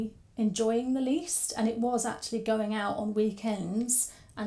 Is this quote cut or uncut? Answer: uncut